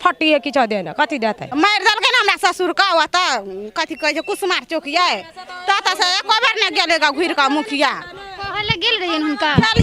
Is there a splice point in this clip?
yes; 1 cut; at 1.5 s

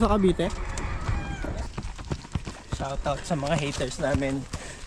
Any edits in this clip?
yes; 1 cut; at 1.7 s

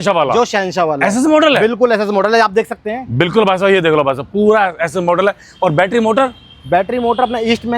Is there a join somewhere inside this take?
no; 0 cuts

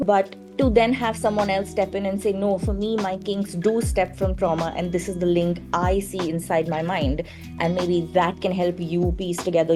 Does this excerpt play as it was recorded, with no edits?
yes; 0 cuts

